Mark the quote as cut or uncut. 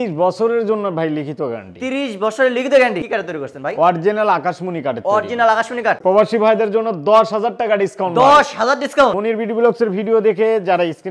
cut